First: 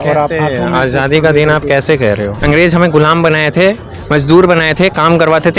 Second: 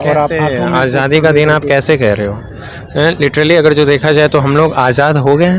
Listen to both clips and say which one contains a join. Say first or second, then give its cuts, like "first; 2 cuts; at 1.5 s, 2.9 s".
first; 1 cut; at 2.3 s